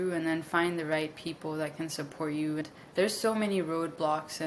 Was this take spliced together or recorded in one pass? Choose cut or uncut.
cut